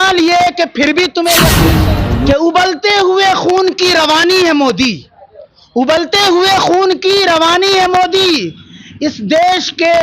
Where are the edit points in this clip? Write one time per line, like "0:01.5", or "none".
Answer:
0:01.8